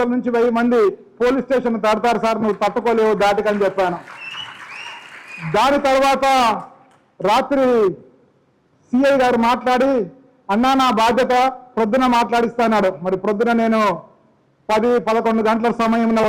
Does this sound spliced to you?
no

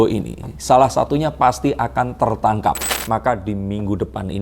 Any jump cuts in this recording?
yes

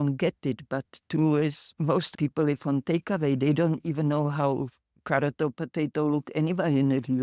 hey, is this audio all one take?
yes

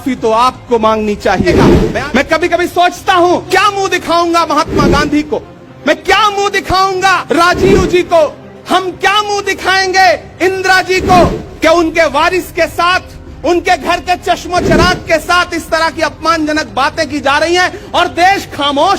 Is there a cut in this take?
yes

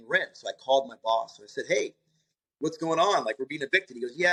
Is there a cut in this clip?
no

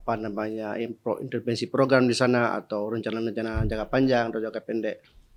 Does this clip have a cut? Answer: no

